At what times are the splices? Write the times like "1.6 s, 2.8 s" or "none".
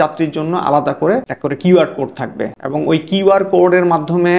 1.3 s, 2.6 s